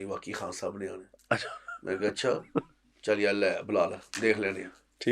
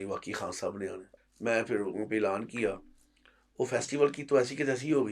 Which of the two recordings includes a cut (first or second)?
second